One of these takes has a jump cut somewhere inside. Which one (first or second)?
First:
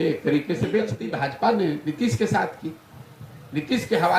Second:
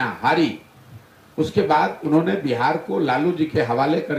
first